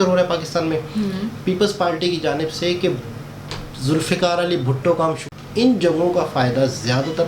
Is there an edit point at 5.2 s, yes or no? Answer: yes